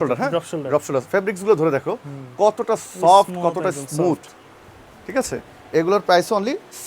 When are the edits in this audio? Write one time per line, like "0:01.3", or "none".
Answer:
none